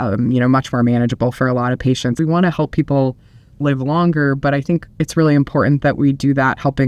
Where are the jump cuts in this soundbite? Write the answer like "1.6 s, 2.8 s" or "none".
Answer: 2.1 s